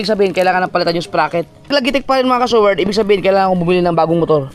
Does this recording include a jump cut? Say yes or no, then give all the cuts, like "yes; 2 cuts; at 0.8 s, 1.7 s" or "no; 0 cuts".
yes; 1 cut; at 1.7 s